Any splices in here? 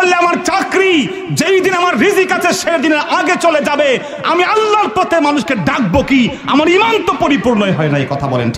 no; 0 cuts

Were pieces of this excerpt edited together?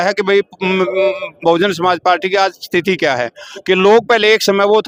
no; 0 cuts

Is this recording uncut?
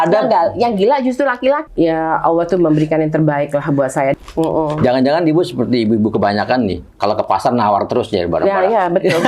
no; 2 cuts; at 1.6 s, 4.1 s

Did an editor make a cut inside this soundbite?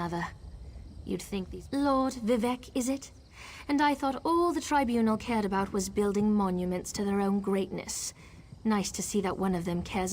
yes; 1 cut; at 1.5 s

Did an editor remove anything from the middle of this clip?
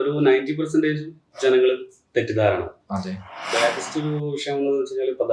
yes; 1 cut; at 3.5 s

